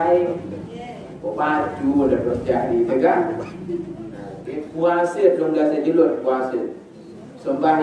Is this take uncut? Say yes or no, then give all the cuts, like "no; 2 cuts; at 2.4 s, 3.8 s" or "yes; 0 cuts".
no; 1 cut; at 4.3 s